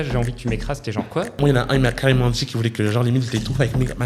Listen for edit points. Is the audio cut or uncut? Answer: cut